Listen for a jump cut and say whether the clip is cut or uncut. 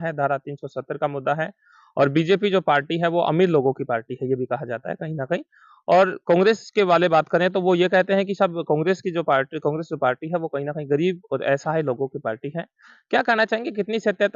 uncut